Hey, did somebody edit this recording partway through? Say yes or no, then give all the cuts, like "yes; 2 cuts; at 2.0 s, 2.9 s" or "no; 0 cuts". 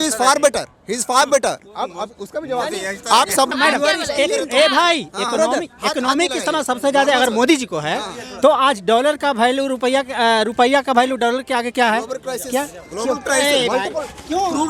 yes; 1 cut; at 3.5 s